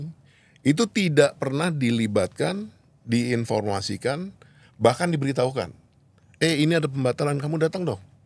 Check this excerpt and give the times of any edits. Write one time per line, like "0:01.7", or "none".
none